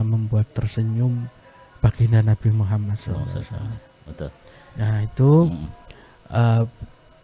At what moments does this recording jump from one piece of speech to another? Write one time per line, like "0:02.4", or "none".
none